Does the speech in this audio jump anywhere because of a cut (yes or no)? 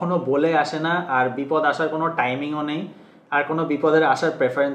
no